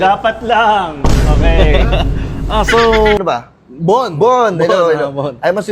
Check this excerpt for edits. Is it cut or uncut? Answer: cut